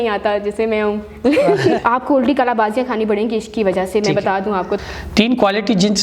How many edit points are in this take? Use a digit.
2